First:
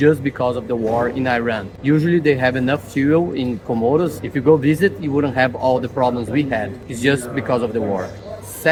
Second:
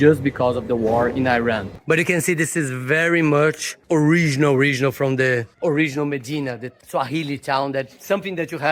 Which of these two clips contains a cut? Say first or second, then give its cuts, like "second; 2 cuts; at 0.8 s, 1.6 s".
second; 1 cut; at 1.7 s